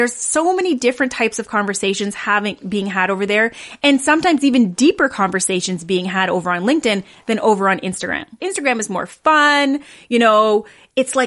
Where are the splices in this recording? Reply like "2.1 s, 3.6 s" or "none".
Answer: none